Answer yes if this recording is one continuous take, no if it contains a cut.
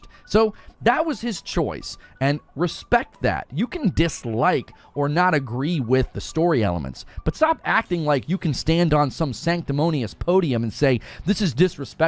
yes